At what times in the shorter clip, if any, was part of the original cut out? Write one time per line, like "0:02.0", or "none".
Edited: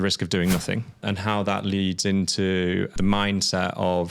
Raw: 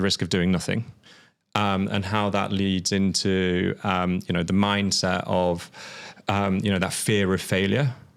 0:01.0
0:02.9